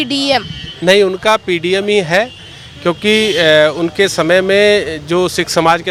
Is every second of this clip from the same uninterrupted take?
yes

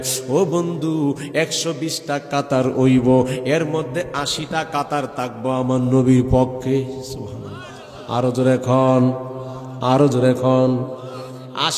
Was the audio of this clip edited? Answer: no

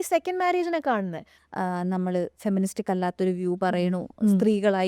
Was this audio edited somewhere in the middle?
yes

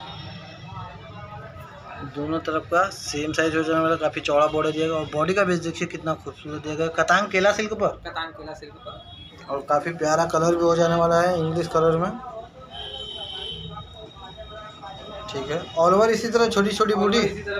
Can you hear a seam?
no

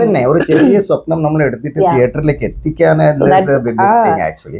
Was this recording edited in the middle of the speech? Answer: no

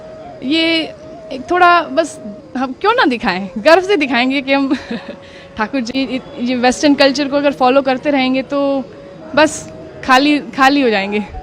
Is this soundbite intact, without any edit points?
no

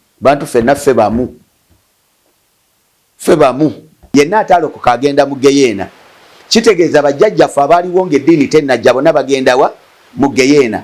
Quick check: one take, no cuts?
no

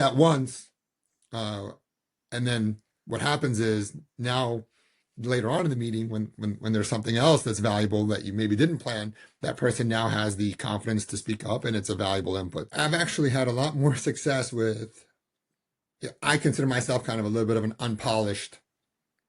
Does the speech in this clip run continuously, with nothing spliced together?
no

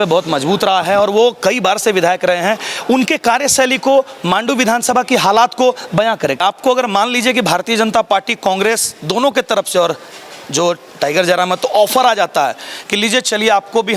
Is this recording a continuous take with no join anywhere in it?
no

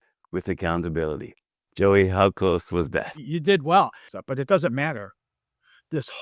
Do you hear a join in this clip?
yes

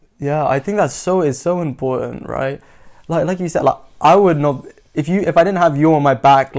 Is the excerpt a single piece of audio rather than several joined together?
yes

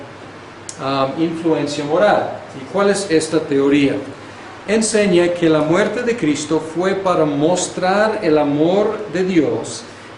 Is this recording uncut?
yes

